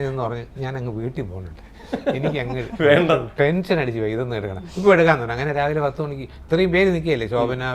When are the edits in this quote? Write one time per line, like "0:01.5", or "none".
none